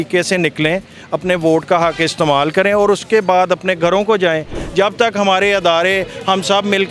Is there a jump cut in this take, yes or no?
yes